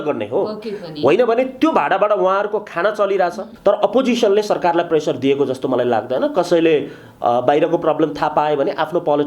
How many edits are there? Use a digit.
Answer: 1